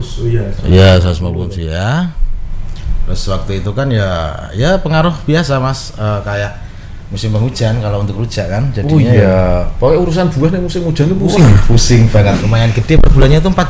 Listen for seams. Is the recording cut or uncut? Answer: cut